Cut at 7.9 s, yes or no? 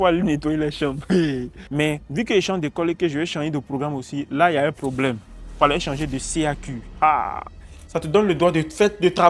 yes